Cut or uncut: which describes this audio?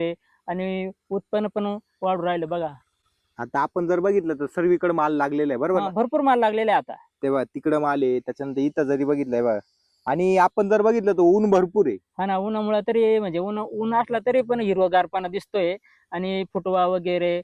uncut